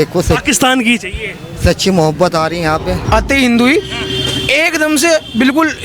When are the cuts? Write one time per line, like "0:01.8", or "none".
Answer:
0:02.9